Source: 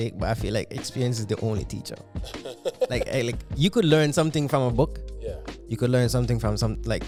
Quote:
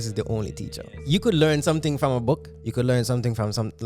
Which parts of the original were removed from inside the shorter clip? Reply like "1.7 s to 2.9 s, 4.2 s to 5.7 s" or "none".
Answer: 2.1 s to 3.5 s, 5.1 s to 5.6 s